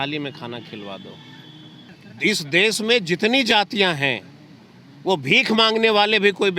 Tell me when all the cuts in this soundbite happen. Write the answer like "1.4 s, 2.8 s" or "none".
1.9 s